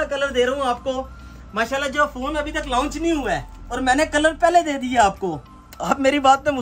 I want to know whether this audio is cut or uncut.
uncut